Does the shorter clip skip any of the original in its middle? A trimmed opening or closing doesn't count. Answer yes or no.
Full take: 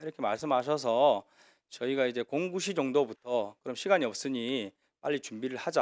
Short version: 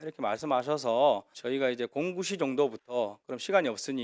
yes